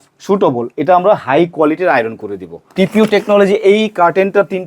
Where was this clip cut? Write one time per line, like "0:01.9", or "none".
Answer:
0:02.6